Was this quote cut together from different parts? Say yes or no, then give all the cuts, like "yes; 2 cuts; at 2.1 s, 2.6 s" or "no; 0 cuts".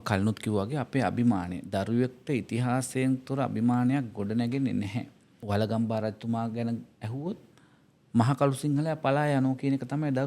yes; 1 cut; at 5.4 s